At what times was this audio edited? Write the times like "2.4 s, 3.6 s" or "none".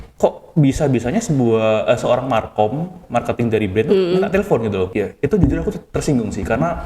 4.9 s

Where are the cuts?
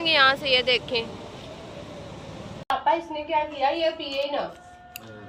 2.7 s

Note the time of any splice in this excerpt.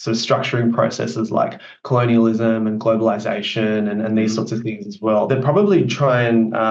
5.3 s

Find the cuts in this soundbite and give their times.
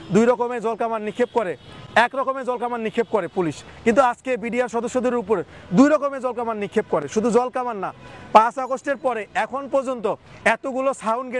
none

